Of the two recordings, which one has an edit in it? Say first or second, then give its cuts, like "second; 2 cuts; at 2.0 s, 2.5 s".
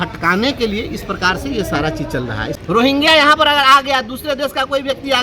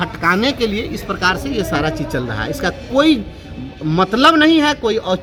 first; 1 cut; at 2.5 s